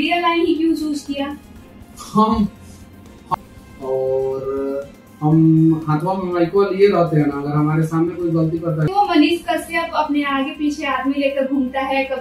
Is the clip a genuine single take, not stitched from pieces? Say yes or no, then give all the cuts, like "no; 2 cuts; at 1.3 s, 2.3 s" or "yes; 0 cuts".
no; 2 cuts; at 3.3 s, 8.9 s